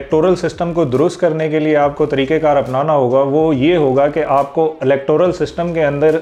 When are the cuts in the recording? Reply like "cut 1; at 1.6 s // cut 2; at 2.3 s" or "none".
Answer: none